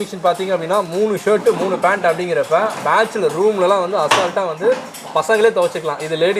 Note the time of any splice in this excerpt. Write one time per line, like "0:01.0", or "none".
none